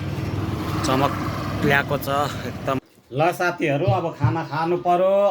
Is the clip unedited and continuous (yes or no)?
no